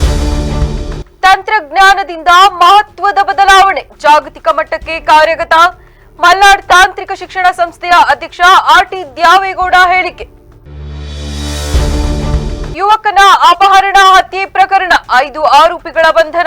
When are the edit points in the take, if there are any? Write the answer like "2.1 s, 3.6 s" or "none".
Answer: 0.9 s